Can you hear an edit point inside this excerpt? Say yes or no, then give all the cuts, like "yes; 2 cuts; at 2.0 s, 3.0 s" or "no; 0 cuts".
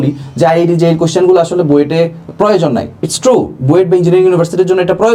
no; 0 cuts